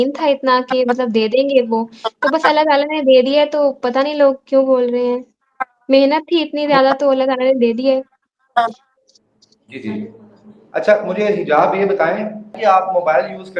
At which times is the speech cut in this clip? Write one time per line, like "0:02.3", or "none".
none